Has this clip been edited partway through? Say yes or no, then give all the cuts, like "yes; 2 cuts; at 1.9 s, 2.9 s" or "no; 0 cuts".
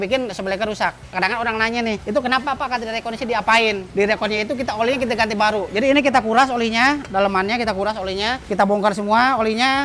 yes; 4 cuts; at 1.1 s, 2.0 s, 3.8 s, 8.5 s